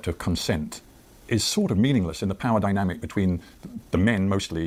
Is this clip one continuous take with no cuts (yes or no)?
yes